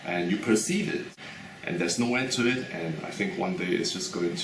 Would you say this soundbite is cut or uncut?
cut